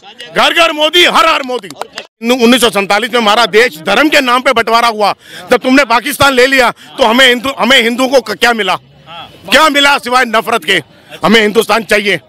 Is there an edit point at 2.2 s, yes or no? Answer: yes